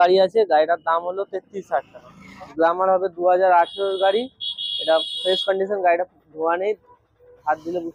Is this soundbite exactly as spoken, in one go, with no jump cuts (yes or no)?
no